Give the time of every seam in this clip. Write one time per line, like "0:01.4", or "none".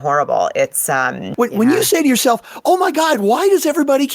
0:01.2